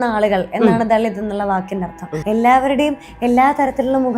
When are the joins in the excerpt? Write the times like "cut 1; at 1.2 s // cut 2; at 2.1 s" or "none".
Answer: cut 1; at 2.1 s